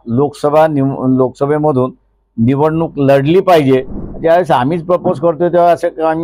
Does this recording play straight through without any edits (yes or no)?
no